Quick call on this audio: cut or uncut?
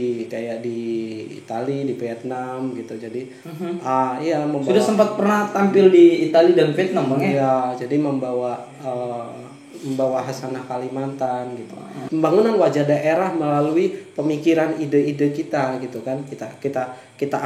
cut